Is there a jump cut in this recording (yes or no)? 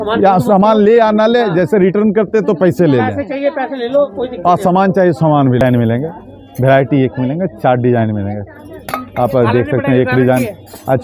yes